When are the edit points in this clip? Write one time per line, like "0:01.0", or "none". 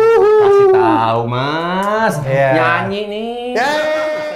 none